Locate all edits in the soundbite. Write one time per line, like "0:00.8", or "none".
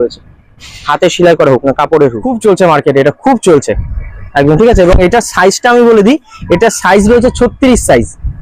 0:02.3